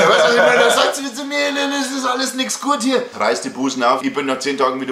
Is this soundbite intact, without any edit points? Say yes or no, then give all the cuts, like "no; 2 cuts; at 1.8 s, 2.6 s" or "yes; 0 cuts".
no; 2 cuts; at 3.1 s, 4.0 s